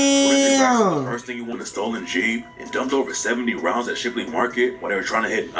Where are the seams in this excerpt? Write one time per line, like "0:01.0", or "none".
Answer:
0:01.5